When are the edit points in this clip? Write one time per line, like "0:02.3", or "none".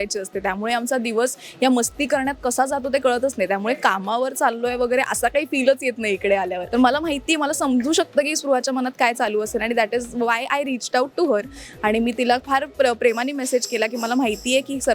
0:06.6